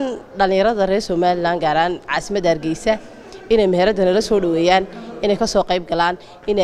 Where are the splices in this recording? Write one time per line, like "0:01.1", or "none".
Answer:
none